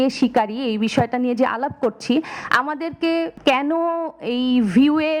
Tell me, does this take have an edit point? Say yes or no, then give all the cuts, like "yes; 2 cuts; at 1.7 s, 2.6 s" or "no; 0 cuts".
yes; 1 cut; at 3.3 s